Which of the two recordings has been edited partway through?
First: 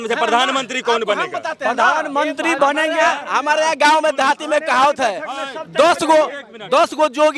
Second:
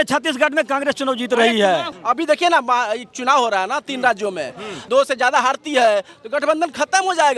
second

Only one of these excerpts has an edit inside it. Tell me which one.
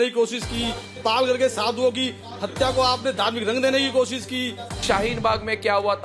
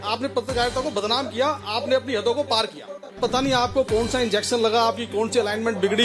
second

